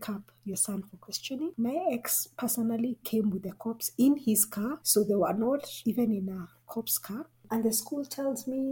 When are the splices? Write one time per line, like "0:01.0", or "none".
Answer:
0:01.5
0:04.8
0:07.4